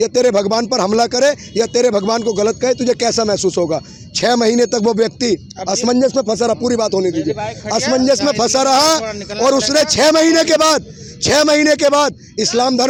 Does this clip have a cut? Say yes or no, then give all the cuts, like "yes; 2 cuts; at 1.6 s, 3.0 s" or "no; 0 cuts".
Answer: no; 0 cuts